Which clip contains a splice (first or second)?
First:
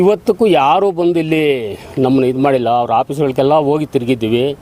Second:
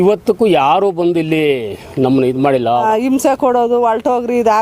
second